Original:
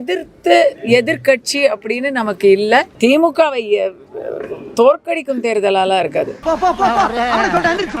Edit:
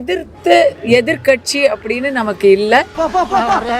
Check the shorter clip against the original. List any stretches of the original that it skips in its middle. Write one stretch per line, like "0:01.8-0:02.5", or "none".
0:02.9-0:06.4